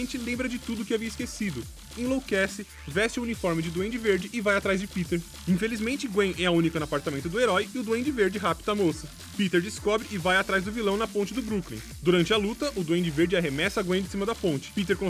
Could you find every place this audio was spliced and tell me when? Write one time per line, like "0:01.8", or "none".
none